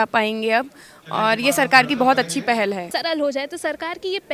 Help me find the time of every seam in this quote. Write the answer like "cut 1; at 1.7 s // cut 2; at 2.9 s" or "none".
cut 1; at 2.9 s

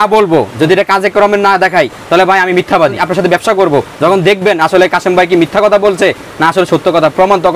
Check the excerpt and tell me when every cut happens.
cut 1; at 3.0 s

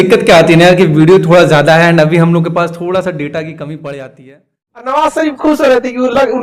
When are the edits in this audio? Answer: cut 1; at 4.5 s

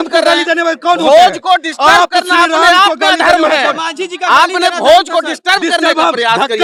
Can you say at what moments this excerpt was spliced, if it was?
none

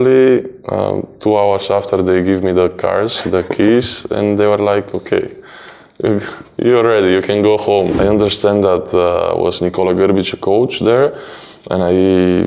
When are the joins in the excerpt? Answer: cut 1; at 7.9 s

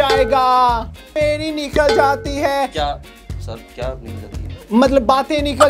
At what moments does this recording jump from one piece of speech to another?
cut 1; at 1.1 s

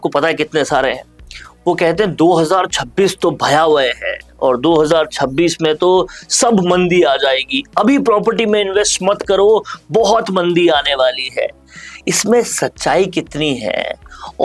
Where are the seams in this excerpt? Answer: none

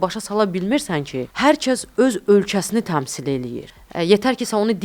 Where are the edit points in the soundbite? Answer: cut 1; at 1.2 s // cut 2; at 3.6 s

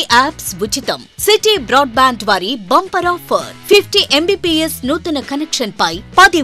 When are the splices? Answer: none

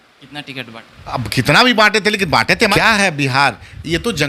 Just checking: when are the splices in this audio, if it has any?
cut 1; at 2.7 s

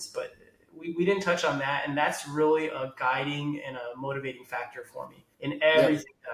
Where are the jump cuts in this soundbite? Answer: cut 1; at 5.2 s

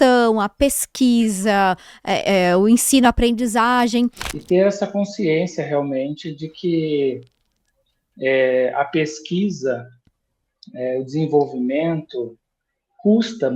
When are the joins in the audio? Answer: cut 1; at 4.3 s

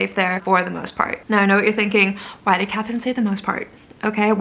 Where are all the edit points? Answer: cut 1; at 1.2 s

